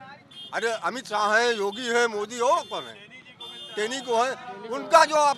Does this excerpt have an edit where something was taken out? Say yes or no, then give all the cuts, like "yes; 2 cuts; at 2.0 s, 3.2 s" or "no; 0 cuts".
no; 0 cuts